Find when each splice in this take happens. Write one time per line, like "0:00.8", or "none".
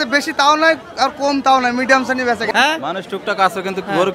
0:02.5